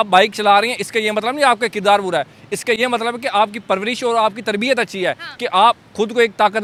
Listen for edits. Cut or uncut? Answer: uncut